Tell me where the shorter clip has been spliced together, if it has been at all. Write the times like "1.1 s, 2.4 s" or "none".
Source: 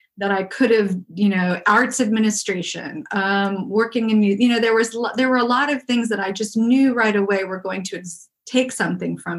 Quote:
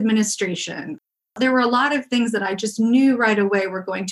1.1 s